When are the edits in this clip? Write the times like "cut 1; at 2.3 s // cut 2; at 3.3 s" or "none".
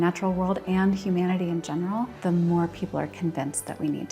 cut 1; at 2.1 s

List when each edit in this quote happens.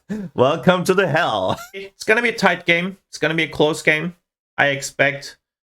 cut 1; at 1.7 s

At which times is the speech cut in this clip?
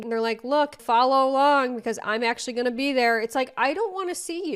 none

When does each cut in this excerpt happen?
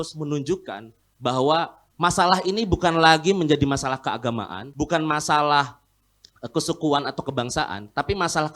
cut 1; at 4.6 s

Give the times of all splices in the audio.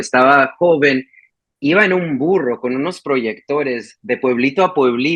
none

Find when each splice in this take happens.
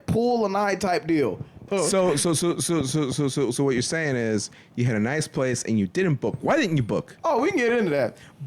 cut 1; at 1.6 s

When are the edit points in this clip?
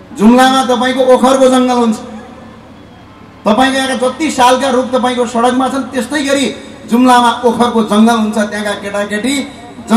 none

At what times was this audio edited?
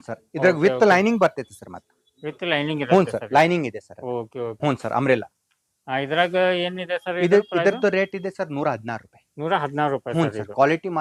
cut 1; at 4.5 s

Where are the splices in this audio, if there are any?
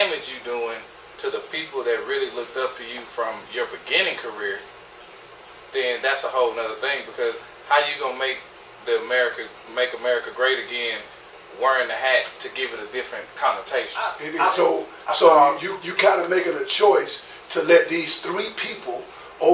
cut 1; at 14.2 s

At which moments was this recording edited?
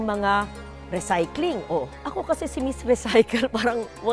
cut 1; at 2.0 s

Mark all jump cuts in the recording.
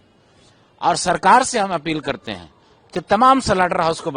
none

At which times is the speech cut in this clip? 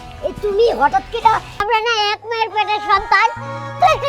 cut 1; at 1.5 s

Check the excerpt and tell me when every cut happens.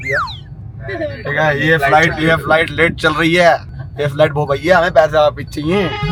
none

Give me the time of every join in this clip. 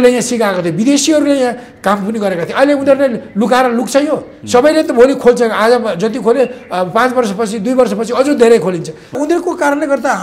cut 1; at 9.2 s

